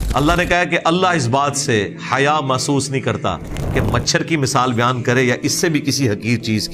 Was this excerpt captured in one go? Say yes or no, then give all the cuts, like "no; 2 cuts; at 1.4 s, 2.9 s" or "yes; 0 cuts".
yes; 0 cuts